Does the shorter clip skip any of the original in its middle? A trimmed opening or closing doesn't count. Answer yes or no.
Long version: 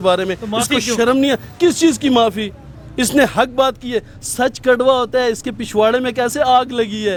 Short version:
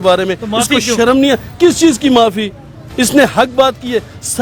no